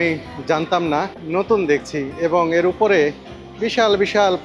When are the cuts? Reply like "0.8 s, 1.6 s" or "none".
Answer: 1.2 s